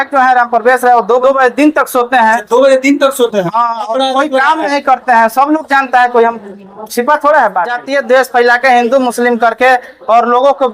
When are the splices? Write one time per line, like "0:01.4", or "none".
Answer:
0:01.2
0:07.8

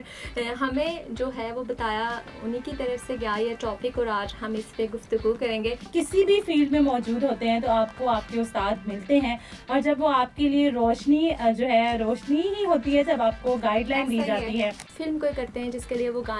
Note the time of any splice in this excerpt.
0:05.9
0:14.9

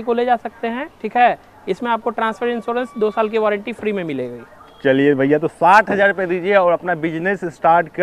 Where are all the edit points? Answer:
none

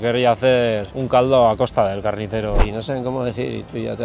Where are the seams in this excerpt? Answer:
0:00.9
0:02.6

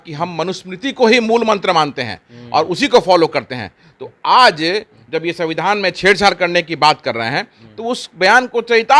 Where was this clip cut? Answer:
none

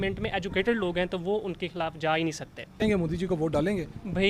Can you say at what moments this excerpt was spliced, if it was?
0:02.8

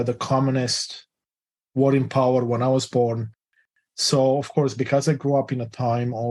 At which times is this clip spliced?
0:03.6

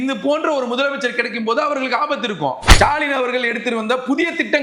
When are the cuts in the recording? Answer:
0:02.7

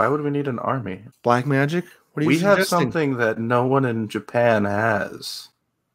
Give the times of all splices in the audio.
0:01.0

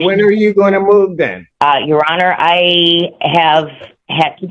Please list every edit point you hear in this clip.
0:01.4

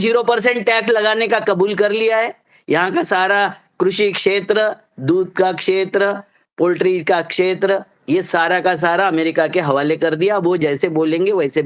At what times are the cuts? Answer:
none

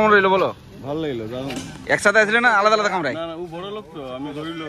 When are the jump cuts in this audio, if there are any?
none

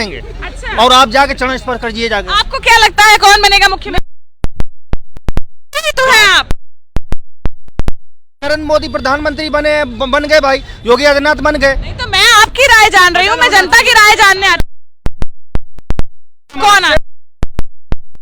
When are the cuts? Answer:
none

